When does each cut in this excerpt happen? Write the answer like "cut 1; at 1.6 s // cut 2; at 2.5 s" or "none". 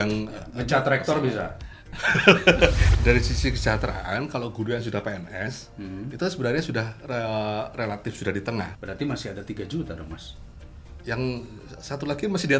cut 1; at 2.9 s // cut 2; at 8.7 s